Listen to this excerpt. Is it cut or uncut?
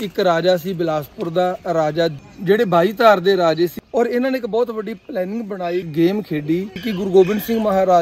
cut